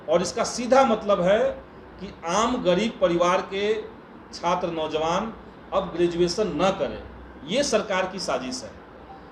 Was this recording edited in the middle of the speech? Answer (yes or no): no